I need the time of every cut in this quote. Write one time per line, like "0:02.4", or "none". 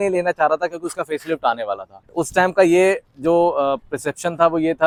none